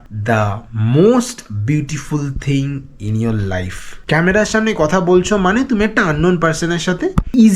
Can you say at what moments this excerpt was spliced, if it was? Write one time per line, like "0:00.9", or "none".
0:03.9